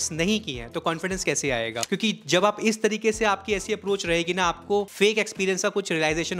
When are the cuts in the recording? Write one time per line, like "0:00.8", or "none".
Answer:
0:01.8
0:04.9